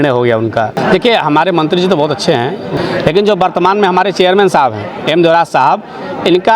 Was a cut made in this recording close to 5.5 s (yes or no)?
no